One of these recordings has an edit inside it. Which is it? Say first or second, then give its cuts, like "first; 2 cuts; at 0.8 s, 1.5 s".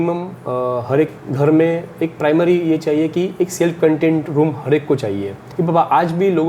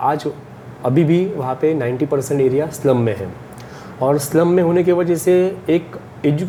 first; 2 cuts; at 1.2 s, 5.4 s